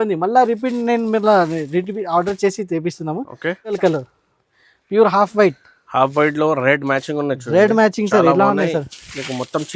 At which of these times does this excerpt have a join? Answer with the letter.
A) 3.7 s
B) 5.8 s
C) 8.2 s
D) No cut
A